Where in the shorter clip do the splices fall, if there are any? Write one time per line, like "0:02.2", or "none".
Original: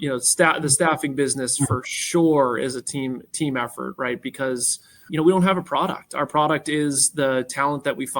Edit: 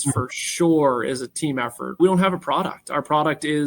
0:01.4